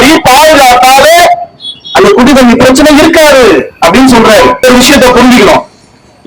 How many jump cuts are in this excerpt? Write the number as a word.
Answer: one